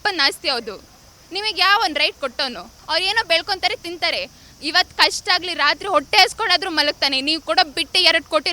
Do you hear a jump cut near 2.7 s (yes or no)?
yes